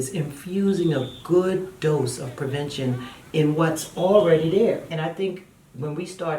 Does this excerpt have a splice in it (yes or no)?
yes